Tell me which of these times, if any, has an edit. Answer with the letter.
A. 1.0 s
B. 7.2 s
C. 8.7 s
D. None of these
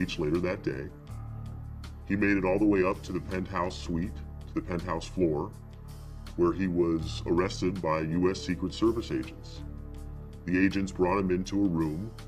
D